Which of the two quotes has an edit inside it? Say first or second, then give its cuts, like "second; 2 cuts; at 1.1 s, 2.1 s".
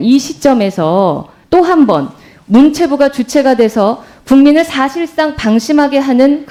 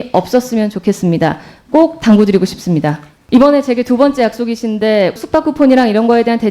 second; 1 cut; at 5.2 s